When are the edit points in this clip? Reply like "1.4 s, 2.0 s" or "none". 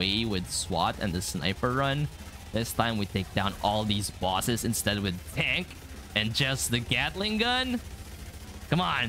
none